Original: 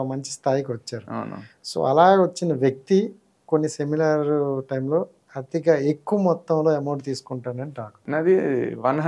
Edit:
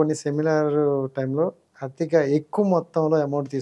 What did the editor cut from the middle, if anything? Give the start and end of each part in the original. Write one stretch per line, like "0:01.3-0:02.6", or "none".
none